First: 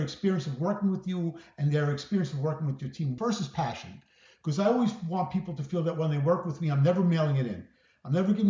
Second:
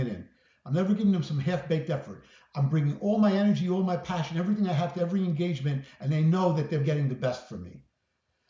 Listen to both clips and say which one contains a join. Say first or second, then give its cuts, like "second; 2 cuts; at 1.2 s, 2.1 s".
first; 1 cut; at 3.1 s